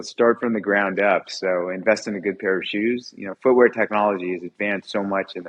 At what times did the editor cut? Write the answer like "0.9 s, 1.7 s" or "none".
none